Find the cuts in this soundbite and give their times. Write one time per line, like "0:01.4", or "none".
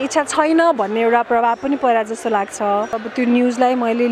0:03.0

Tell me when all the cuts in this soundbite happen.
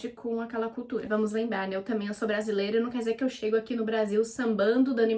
0:01.1

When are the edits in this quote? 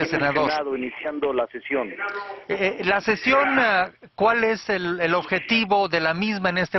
0:05.2

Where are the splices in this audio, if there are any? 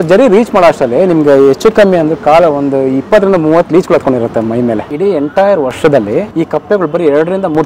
0:04.9
0:06.3

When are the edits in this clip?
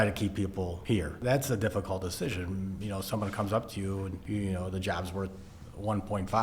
0:01.2
0:04.2

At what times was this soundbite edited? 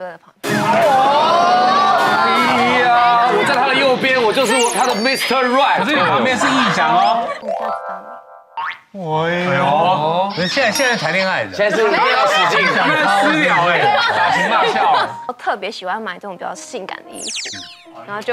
0:07.4
0:15.3

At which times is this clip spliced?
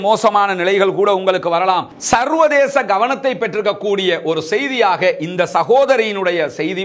0:01.9

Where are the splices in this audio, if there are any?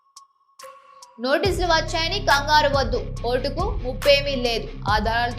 0:00.9

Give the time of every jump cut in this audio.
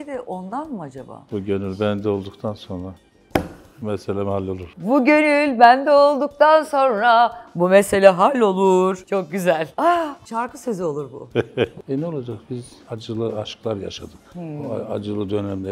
0:01.1
0:11.7

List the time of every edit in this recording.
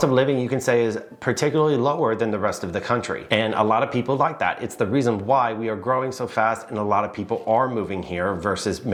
none

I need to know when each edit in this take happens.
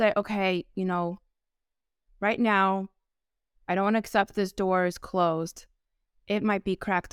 none

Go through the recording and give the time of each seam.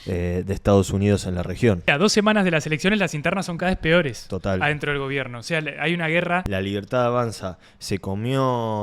0:01.9
0:06.5

